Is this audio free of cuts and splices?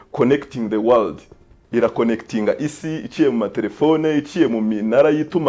no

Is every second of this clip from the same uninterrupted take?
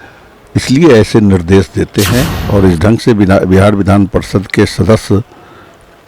no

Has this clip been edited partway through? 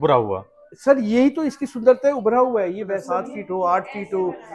yes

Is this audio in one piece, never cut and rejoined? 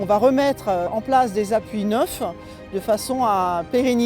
no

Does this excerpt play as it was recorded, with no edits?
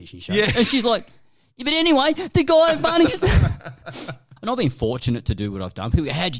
no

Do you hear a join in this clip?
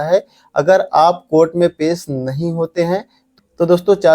yes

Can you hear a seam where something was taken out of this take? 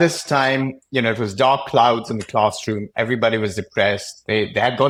no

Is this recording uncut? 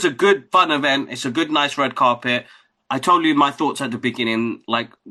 yes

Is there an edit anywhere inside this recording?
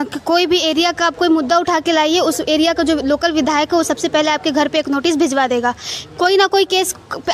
no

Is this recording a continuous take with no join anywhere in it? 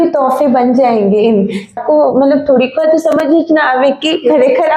no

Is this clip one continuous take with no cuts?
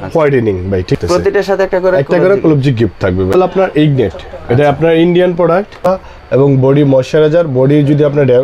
no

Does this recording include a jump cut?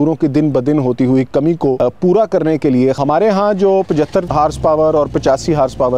yes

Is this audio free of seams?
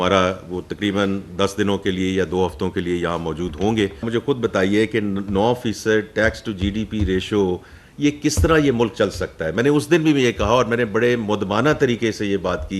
no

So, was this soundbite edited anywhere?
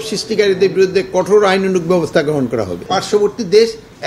yes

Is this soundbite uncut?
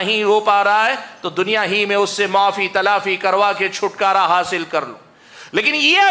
yes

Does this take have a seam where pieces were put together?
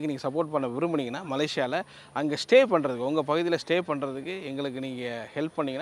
no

